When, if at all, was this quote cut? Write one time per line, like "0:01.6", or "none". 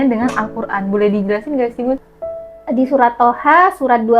0:02.0